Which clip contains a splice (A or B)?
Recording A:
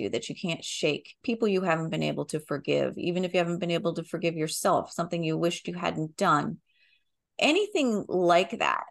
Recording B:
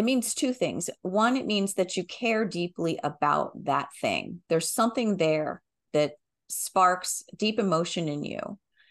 A